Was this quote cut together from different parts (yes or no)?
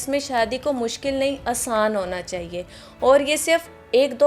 no